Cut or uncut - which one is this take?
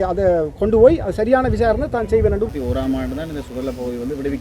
cut